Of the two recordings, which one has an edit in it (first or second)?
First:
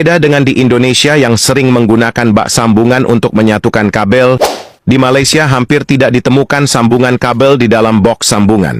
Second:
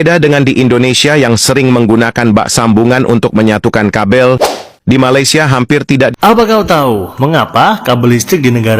second